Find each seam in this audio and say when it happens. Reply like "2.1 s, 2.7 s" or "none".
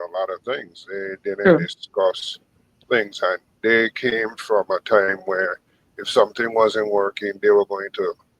none